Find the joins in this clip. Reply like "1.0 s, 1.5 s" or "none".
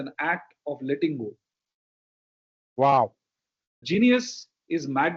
3.8 s